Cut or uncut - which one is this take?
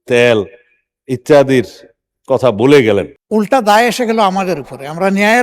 cut